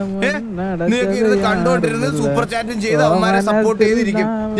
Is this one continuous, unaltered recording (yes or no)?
yes